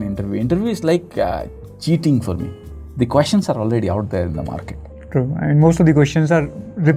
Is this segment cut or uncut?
uncut